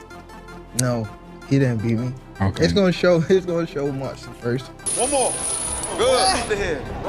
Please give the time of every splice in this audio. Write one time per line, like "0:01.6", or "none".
0:04.8